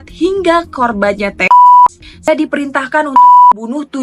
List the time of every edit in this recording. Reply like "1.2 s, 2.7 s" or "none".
2.3 s